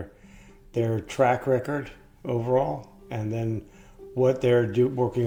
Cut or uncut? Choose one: uncut